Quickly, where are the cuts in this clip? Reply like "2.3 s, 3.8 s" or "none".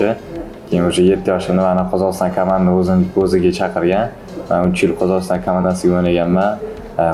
none